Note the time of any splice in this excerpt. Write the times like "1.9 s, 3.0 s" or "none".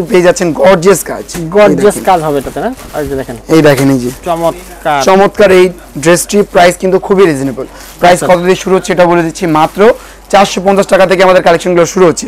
none